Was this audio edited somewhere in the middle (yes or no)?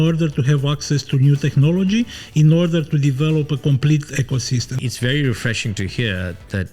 yes